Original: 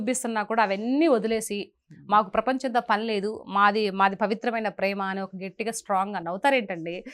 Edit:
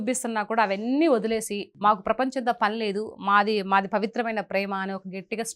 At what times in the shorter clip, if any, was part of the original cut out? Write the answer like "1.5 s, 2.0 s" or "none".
1.6 s